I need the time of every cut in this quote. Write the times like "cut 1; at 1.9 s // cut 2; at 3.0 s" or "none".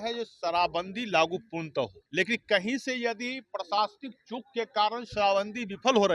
cut 1; at 2.0 s